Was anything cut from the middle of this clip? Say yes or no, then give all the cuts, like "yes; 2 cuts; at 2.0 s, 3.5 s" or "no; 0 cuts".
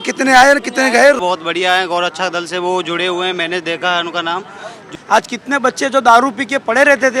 yes; 2 cuts; at 1.2 s, 4.9 s